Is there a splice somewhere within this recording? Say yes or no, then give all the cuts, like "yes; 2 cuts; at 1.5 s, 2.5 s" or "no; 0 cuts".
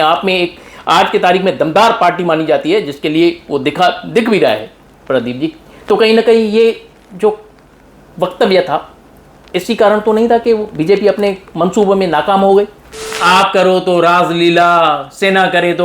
yes; 1 cut; at 13.2 s